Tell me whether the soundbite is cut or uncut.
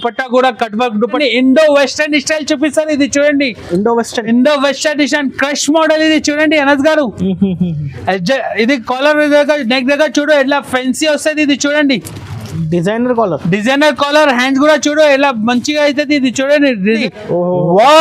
cut